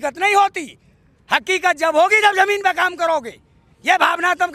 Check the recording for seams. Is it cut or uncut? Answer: uncut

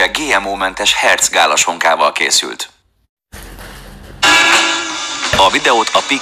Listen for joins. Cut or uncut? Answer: uncut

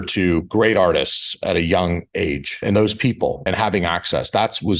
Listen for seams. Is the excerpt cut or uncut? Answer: uncut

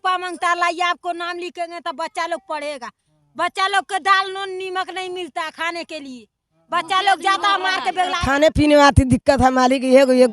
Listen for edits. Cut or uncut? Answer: cut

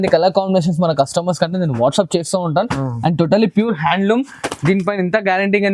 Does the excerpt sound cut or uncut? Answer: uncut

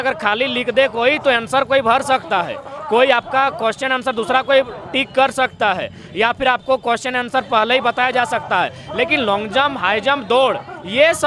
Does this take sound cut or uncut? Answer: uncut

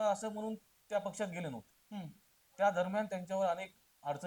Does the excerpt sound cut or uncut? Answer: uncut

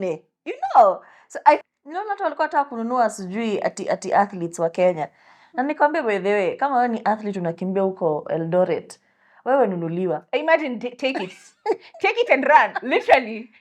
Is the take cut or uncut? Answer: cut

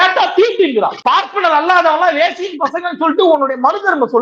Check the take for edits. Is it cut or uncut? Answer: cut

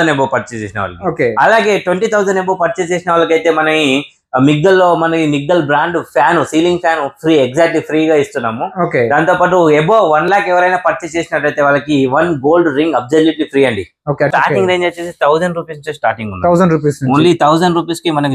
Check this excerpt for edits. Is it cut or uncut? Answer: cut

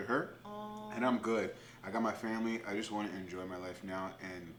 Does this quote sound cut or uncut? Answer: uncut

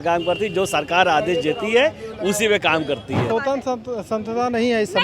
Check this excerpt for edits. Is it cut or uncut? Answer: cut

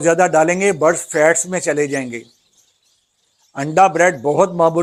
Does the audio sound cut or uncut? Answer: uncut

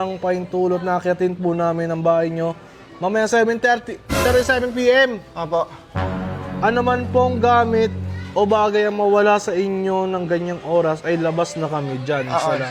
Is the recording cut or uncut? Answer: uncut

